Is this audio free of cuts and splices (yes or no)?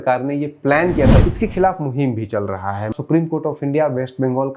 no